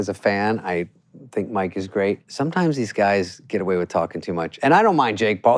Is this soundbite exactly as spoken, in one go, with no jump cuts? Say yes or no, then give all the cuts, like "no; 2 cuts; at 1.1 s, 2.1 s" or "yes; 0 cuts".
no; 2 cuts; at 2.3 s, 4.5 s